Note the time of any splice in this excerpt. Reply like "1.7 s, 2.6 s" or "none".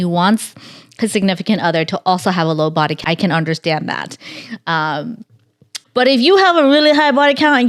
3.0 s, 5.7 s